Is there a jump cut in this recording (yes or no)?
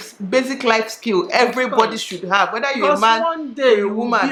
no